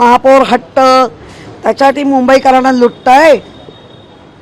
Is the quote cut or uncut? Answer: uncut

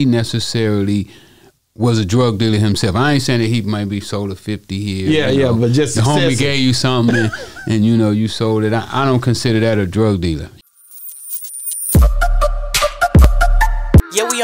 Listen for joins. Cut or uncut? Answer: cut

